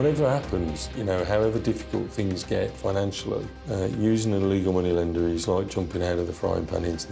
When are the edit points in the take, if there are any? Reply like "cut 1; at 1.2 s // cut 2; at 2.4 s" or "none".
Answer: none